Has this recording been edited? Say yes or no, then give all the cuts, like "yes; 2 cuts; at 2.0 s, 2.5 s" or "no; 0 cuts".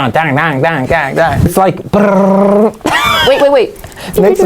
yes; 1 cut; at 1.5 s